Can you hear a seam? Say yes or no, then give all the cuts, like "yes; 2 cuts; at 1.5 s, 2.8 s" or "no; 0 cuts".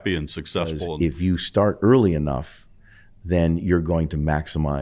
yes; 1 cut; at 0.9 s